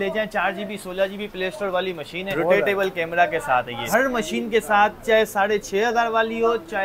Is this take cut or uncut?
cut